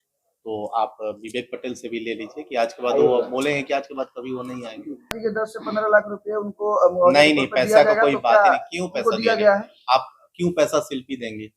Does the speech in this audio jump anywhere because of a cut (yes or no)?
yes